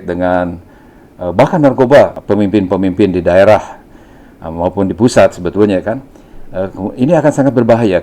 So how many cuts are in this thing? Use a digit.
1